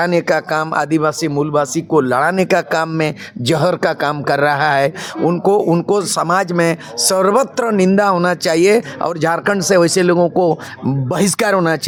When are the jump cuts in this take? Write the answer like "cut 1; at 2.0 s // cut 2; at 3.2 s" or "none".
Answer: none